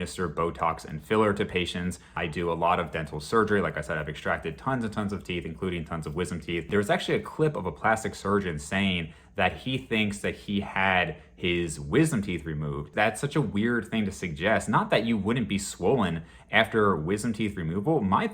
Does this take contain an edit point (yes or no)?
yes